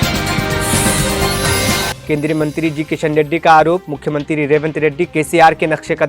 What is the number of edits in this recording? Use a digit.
1